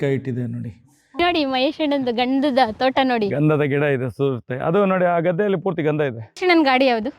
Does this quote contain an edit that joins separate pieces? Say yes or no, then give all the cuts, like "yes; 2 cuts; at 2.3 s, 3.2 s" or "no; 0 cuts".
yes; 2 cuts; at 1.2 s, 6.4 s